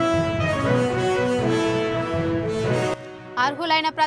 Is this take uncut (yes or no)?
yes